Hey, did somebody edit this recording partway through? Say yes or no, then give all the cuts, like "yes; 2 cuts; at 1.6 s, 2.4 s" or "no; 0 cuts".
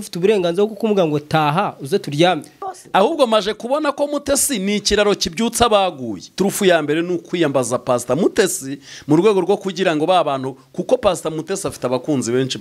yes; 2 cuts; at 2.7 s, 6.2 s